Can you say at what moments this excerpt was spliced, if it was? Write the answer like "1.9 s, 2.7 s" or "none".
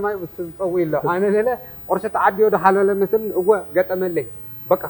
none